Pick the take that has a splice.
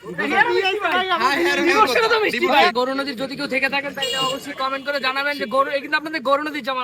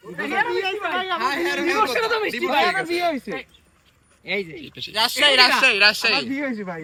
first; 1 cut; at 2.7 s

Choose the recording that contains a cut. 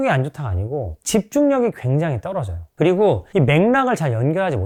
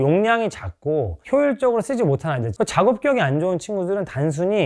second; 1 cut; at 2.4 s

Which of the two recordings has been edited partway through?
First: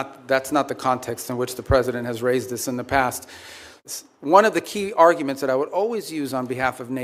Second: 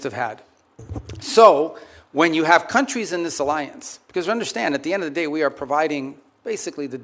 first; 1 cut; at 3.9 s

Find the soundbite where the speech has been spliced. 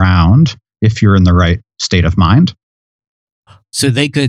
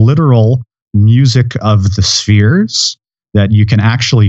first; 1 cut; at 3.0 s

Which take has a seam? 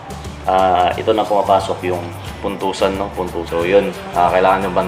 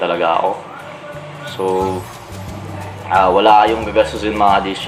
first; 1 cut; at 3.5 s

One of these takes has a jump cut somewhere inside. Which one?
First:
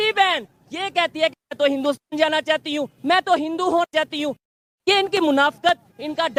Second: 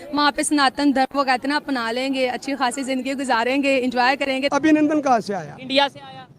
second; 1 cut; at 4.5 s

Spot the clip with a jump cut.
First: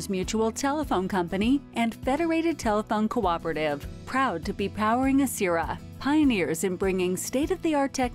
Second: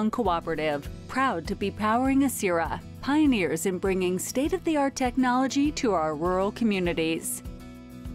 second; 1 cut; at 7.2 s

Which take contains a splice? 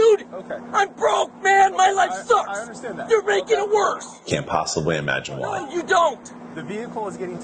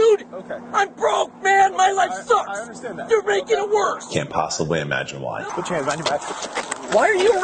second; 2 cuts; at 4.0 s, 5.4 s

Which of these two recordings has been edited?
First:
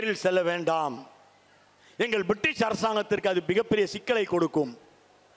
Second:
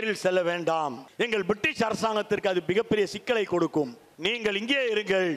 second; 2 cuts; at 1.0 s, 4.0 s

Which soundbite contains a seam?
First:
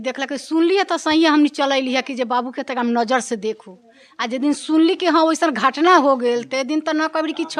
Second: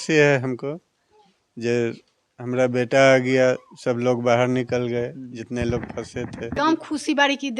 second; 1 cut; at 6.6 s

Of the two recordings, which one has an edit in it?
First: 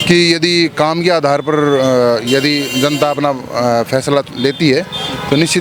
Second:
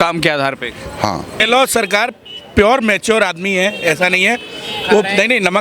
second; 1 cut; at 1.3 s

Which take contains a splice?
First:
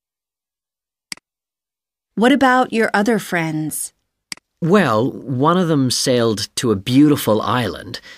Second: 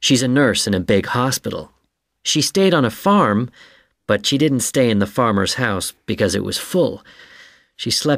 first; 1 cut; at 1.2 s

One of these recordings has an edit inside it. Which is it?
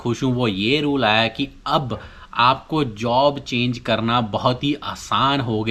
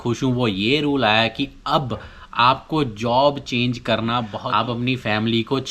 second; 1 cut; at 4.3 s

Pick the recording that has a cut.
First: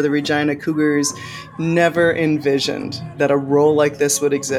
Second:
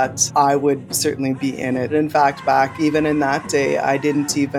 second; 1 cut; at 1.9 s

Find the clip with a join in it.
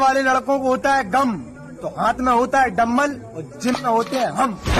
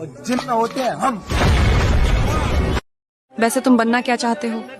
second; 1 cut; at 2.8 s

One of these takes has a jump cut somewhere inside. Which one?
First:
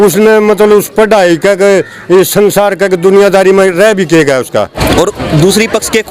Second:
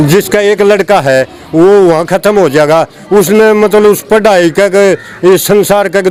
first; 1 cut; at 4.8 s

